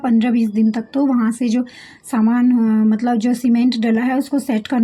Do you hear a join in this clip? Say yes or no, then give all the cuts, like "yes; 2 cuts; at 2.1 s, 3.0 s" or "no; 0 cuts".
no; 0 cuts